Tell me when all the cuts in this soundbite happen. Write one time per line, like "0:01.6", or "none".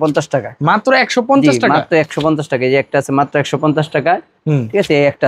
none